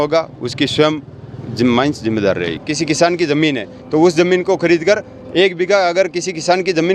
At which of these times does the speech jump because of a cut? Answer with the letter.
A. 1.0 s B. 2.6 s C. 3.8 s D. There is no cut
B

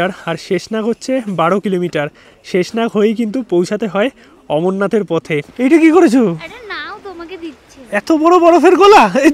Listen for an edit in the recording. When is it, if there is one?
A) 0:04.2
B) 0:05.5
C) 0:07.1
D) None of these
B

